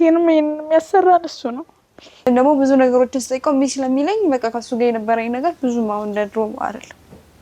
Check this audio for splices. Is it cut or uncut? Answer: cut